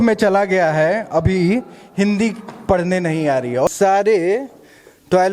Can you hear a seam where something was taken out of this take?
yes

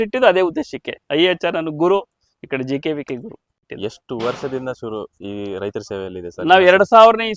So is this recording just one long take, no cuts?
yes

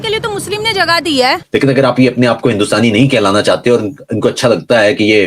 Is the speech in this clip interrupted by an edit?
yes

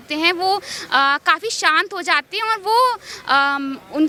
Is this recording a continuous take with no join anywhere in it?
yes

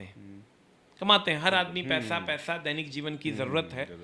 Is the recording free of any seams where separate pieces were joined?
yes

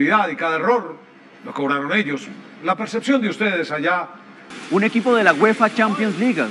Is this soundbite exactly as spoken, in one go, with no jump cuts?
no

